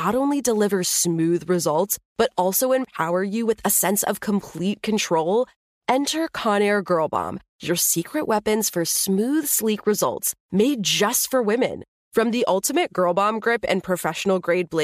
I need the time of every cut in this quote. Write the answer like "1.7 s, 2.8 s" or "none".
none